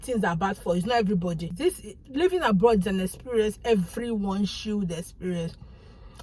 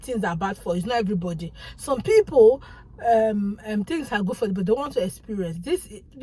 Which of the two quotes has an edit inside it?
first; 1 cut; at 1.5 s

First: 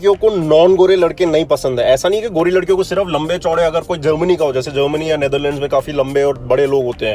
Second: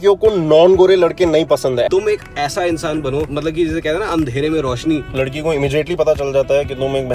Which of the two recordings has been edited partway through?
second; 3 cuts; at 1.9 s, 3.3 s, 5.1 s

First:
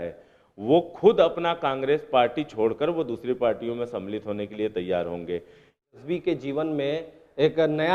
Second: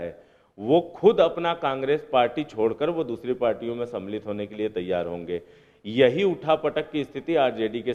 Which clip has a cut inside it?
first; 1 cut; at 5.9 s

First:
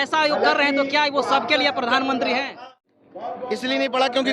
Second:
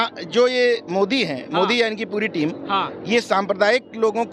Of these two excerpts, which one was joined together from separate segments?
first; 1 cut; at 2.6 s

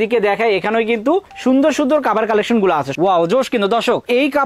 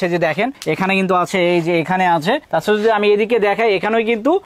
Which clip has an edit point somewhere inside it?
first; 1 cut; at 2.9 s

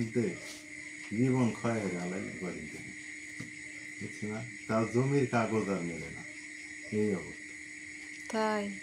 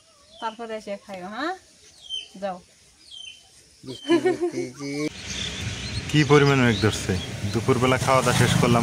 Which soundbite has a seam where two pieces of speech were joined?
second; 1 cut; at 5.1 s

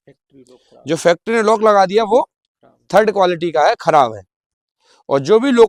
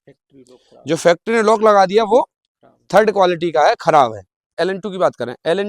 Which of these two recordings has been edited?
second; 1 cut; at 4.4 s

